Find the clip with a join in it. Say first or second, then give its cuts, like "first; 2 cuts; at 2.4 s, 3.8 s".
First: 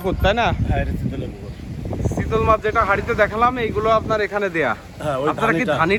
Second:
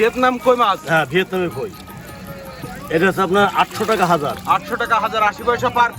second; 1 cut; at 2.7 s